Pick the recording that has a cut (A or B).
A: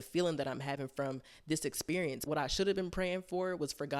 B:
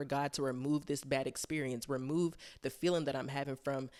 A